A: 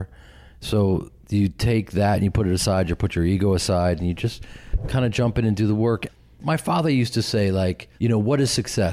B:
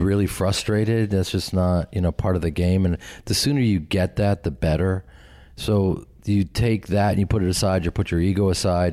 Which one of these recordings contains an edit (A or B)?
A